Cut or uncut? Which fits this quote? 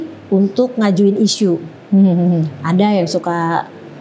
uncut